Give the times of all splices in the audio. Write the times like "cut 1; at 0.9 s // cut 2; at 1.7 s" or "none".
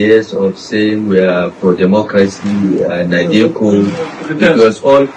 none